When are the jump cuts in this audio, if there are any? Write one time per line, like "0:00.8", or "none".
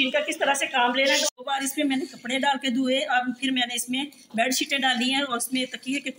0:01.3